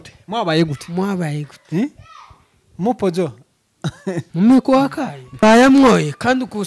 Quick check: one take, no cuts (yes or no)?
no